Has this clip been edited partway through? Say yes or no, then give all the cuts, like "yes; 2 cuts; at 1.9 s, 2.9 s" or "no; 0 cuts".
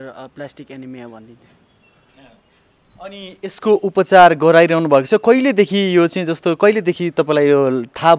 no; 0 cuts